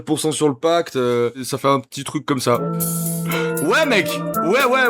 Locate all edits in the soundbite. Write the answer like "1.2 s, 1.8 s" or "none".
1.4 s, 2.6 s